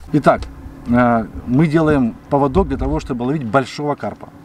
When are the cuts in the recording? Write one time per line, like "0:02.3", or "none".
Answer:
none